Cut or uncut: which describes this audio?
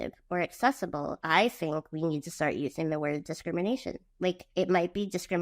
cut